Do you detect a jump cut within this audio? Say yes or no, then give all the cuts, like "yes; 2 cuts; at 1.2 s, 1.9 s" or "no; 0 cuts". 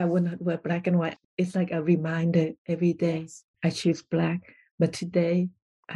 yes; 1 cut; at 1.1 s